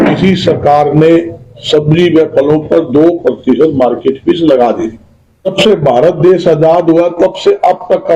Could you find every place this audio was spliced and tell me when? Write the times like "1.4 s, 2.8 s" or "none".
5.5 s